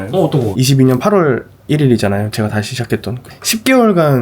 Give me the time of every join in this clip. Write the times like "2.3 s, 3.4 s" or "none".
3.3 s